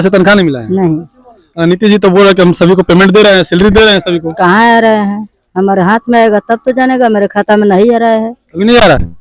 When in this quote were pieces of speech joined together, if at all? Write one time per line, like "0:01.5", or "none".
none